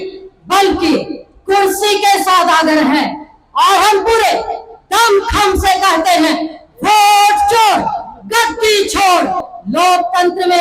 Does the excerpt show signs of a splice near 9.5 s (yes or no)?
yes